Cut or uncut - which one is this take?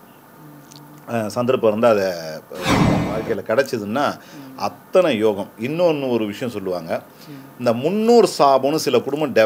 cut